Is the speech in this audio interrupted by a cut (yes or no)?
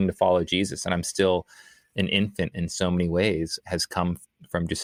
no